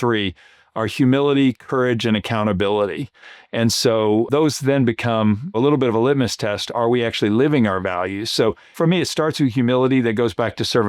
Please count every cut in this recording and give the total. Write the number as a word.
three